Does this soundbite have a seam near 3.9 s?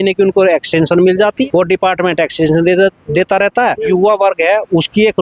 yes; 2 cuts; at 1.4 s, 3.9 s

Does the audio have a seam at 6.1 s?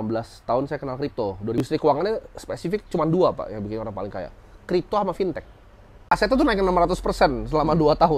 yes; 2 cuts; at 1.7 s, 6.1 s

